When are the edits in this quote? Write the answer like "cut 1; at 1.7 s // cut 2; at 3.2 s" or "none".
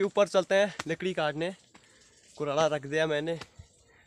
none